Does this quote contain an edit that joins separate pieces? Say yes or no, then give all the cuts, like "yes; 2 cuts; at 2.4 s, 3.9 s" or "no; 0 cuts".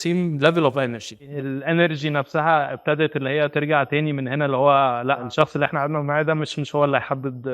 yes; 2 cuts; at 1.2 s, 5.2 s